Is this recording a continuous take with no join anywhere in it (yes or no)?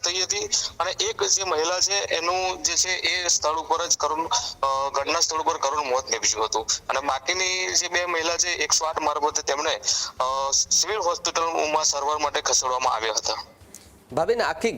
yes